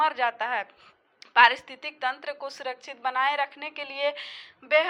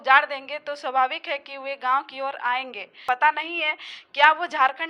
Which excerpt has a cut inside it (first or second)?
second